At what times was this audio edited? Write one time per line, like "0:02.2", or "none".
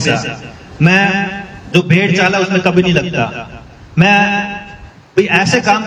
none